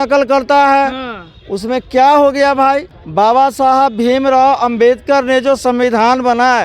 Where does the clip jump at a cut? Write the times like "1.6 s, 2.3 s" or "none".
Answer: 3.0 s